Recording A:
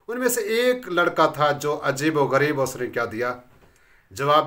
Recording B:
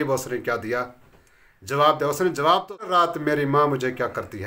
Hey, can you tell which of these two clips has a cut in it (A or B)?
B